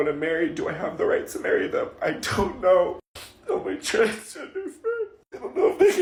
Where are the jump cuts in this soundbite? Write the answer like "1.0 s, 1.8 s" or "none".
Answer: none